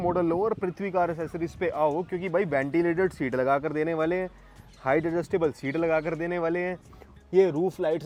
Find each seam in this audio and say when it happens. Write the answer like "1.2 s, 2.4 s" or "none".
none